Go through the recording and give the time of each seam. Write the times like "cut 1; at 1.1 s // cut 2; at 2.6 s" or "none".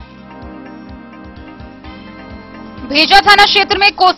cut 1; at 1.6 s